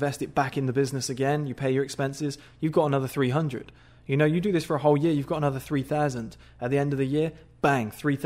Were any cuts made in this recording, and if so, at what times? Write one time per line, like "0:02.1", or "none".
none